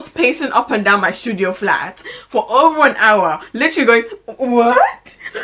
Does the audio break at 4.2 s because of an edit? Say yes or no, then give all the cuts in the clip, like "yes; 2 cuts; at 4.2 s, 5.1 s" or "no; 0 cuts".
no; 0 cuts